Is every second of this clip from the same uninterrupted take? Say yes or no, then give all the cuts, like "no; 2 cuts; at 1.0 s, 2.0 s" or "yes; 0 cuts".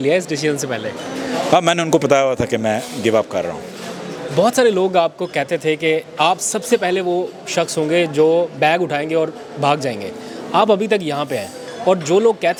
yes; 0 cuts